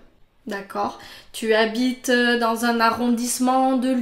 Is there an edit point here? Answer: no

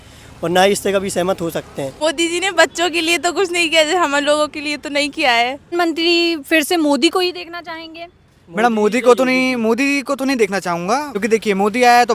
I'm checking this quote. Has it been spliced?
yes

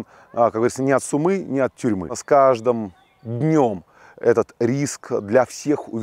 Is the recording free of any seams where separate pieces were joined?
no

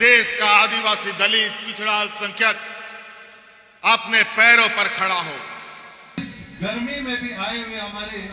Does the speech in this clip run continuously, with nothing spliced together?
no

